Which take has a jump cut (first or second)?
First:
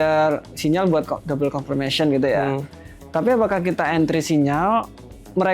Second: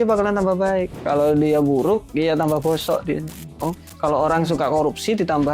second